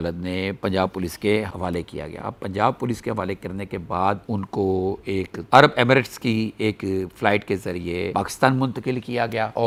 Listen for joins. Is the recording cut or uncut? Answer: uncut